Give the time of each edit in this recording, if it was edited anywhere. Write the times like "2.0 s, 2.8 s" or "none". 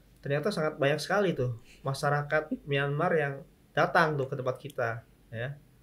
none